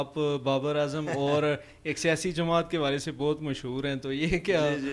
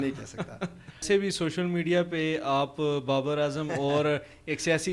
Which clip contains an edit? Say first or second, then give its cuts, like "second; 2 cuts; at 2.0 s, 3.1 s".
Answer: second; 1 cut; at 1.0 s